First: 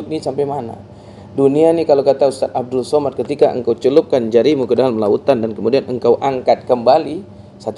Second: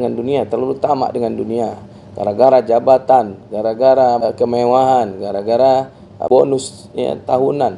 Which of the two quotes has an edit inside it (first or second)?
second